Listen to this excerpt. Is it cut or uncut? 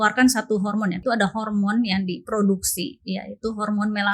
cut